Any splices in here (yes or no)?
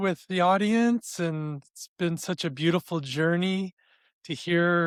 no